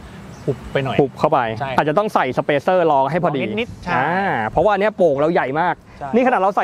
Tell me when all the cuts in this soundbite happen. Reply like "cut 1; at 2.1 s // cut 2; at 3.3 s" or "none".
none